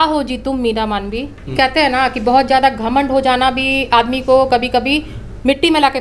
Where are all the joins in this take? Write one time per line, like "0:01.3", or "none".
0:01.5

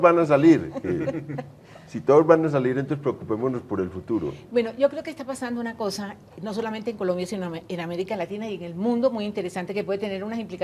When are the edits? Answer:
0:09.1

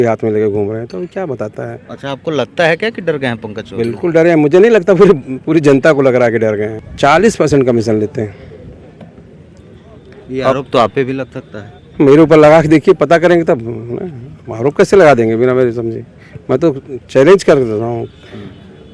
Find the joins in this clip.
0:06.8

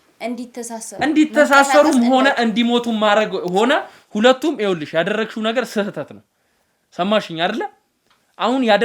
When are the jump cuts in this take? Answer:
none

